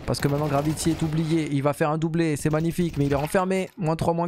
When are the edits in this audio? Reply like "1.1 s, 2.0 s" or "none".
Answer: none